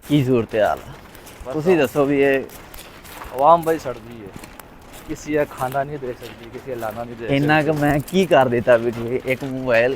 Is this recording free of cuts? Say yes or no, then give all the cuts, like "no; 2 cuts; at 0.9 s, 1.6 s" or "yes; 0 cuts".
no; 1 cut; at 6.9 s